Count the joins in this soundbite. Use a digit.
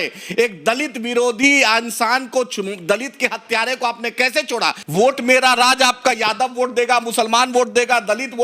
1